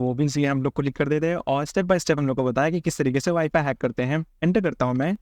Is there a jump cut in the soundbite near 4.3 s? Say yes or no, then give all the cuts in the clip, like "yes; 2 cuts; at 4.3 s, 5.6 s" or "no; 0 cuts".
yes; 1 cut; at 4.3 s